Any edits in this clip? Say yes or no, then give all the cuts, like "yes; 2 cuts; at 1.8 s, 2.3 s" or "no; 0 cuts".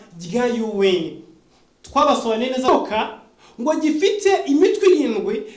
yes; 1 cut; at 2.7 s